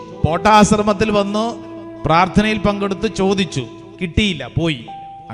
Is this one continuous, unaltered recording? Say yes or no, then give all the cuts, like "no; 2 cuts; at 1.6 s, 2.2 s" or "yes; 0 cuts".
yes; 0 cuts